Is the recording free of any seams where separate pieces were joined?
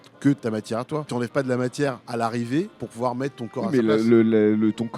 no; 3 cuts; at 1.0 s, 2.0 s, 2.8 s

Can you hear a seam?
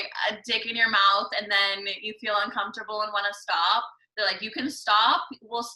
no; 0 cuts

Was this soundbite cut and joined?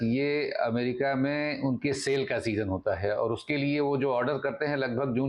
no; 0 cuts

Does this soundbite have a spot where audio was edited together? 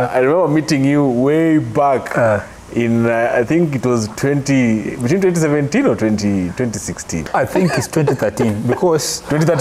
yes; 1 cut; at 7.1 s

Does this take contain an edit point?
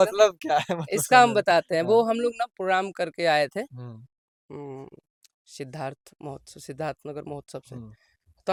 no; 0 cuts

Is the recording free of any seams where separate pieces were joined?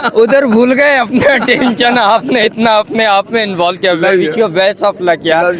yes; 0 cuts

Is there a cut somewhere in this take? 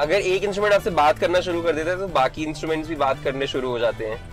no; 0 cuts

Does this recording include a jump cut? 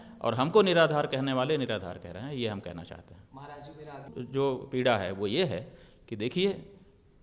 no; 0 cuts

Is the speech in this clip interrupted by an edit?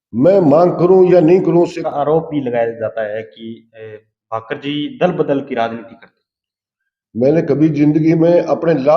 yes; 1 cut; at 1.9 s

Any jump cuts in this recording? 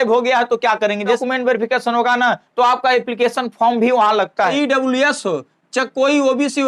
yes; 2 cuts; at 1.2 s, 4.5 s

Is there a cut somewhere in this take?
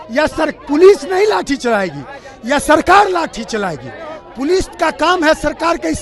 no; 0 cuts

